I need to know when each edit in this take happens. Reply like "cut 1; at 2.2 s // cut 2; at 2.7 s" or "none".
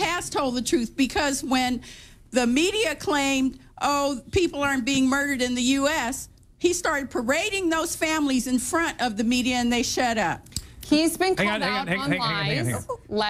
cut 1; at 11.4 s